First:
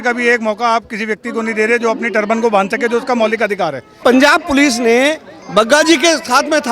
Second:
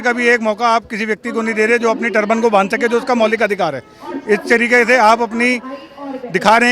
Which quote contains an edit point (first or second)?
first